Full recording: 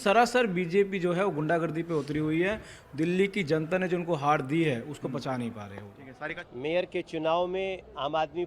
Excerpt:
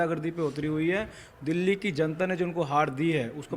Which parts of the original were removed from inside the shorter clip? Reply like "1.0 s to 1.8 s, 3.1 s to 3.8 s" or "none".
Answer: none